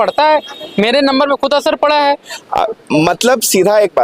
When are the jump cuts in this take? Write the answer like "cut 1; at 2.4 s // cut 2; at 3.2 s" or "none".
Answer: cut 1; at 2.3 s